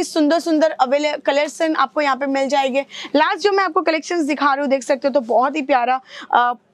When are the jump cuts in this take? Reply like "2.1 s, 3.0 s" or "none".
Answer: none